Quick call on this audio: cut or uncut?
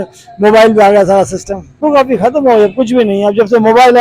cut